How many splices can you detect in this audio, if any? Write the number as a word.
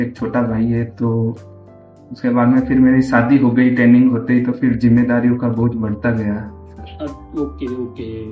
zero